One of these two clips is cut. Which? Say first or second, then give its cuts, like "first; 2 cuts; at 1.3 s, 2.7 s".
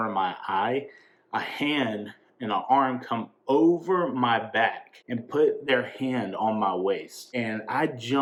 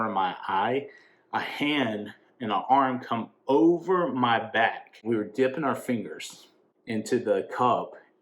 second; 1 cut; at 5.0 s